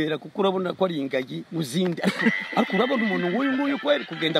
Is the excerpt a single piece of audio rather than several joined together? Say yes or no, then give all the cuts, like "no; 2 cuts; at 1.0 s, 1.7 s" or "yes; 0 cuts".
yes; 0 cuts